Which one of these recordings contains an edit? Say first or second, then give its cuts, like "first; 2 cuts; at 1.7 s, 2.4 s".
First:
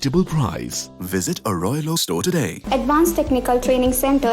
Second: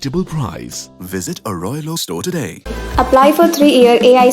first; 1 cut; at 2.6 s